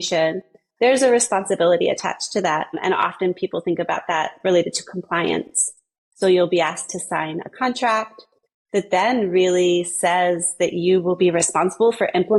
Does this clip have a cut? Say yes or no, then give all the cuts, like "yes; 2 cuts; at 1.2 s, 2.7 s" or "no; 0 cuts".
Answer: no; 0 cuts